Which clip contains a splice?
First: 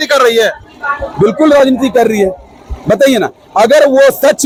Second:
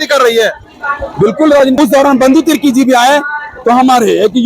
second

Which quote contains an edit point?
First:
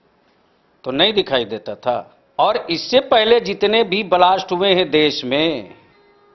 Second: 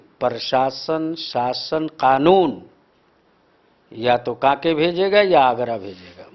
first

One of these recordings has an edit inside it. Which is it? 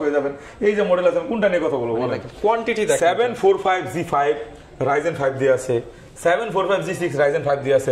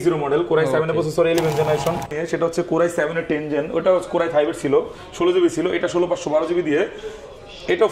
second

